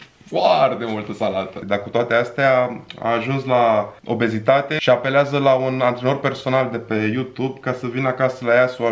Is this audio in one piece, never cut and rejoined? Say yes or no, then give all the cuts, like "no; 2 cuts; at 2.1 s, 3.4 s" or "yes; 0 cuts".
no; 1 cut; at 1.6 s